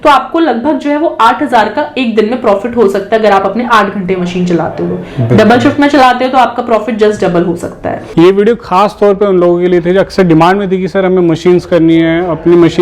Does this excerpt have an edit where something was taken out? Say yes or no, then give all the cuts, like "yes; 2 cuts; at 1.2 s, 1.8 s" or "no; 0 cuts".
yes; 1 cut; at 8.0 s